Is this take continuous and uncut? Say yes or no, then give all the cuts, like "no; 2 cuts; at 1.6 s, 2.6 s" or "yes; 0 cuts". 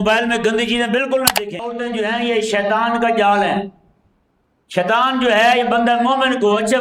no; 1 cut; at 1.7 s